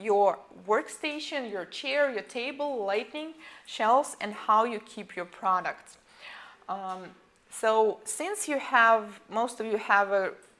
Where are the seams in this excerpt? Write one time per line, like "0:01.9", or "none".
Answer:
0:05.1

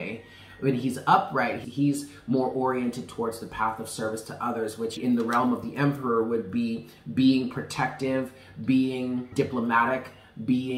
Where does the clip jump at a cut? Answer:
0:01.6
0:05.0
0:09.3

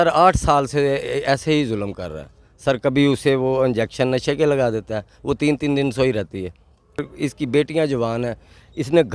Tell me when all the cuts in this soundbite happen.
0:07.1

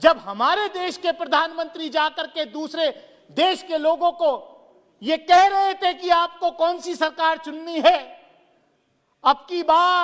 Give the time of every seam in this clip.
none

